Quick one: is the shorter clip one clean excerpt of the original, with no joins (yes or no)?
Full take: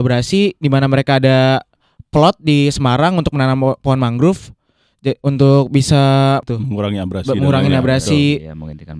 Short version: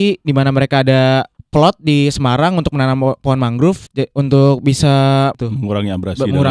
no